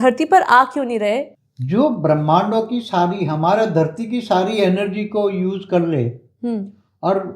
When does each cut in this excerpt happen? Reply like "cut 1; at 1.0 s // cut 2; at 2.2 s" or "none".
cut 1; at 1.3 s